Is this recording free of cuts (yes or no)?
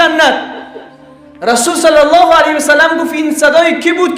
yes